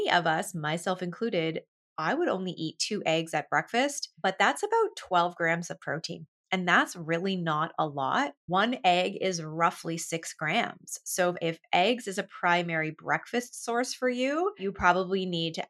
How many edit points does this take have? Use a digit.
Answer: 4